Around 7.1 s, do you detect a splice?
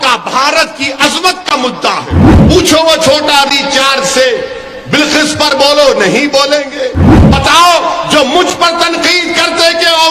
yes; 2 cuts; at 2.3 s, 7.1 s

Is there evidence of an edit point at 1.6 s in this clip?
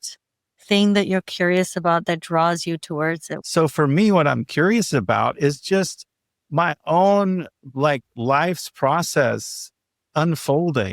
no; 1 cut; at 3.3 s

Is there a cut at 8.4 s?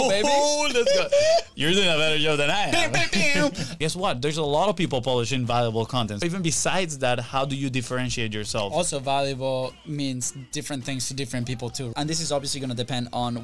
no; 4 cuts; at 3.8 s, 6.2 s, 9.8 s, 11.9 s

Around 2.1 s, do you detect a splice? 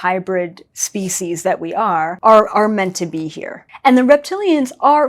yes; 2 cuts; at 2.1 s, 3.7 s

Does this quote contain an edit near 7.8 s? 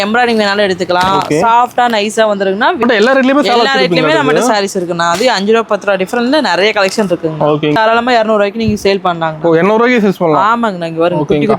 yes; 2 cuts; at 2.8 s, 7.8 s

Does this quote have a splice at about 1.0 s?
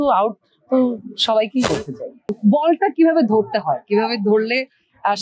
no; 1 cut; at 2.4 s

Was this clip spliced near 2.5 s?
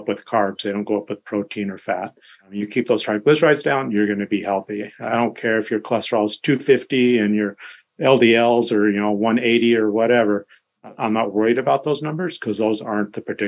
yes; 1 cut; at 2.5 s

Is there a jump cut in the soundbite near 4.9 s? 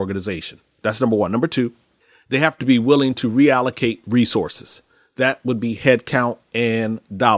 no; 0 cuts

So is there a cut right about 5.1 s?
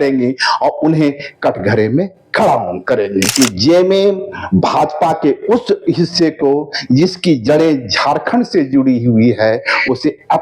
no; 1 cut; at 3.3 s

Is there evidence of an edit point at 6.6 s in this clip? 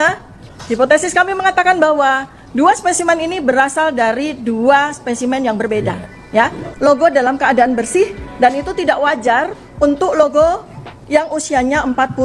yes; 1 cut; at 6.6 s

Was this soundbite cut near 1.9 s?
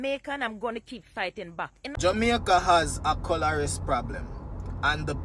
yes; 1 cut; at 1.9 s

